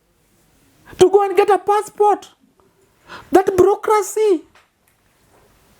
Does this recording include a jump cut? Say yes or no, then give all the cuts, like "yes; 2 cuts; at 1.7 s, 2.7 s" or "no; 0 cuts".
no; 0 cuts